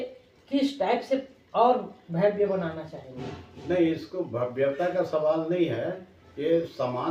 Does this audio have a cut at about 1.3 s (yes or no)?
no